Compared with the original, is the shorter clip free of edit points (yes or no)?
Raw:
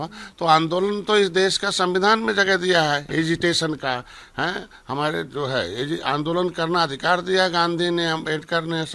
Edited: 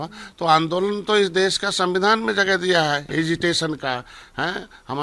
yes